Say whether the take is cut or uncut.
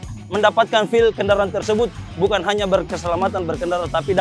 uncut